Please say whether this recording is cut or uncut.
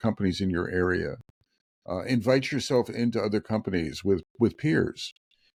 uncut